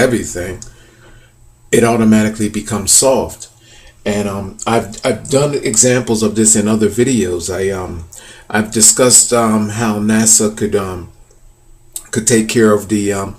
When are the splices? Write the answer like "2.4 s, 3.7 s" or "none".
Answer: 6.0 s